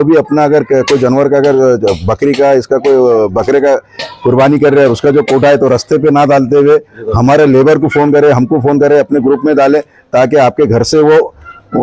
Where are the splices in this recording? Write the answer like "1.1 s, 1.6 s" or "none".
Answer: none

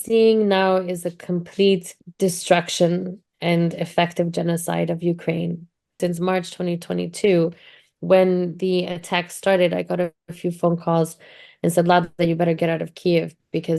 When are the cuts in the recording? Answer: 2.0 s, 6.0 s

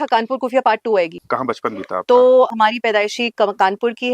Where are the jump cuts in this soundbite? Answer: 1.2 s, 2.5 s

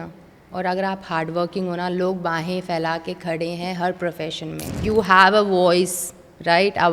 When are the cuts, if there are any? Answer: 4.8 s

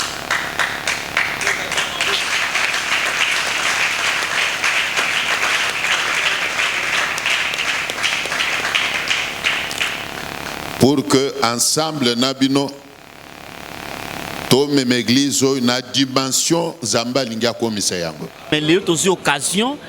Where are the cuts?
18.5 s

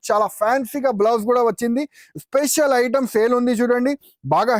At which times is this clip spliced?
none

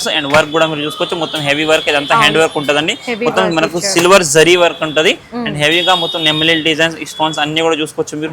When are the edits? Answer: none

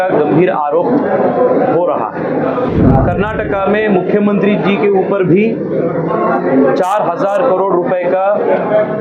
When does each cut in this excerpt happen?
2.7 s

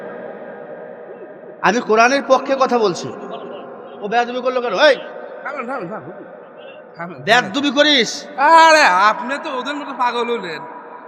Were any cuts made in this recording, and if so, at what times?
6.9 s

